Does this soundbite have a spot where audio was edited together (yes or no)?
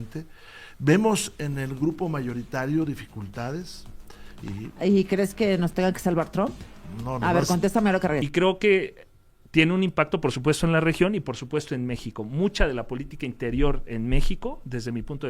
yes